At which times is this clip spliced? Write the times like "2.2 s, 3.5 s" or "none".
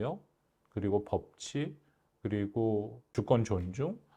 3.1 s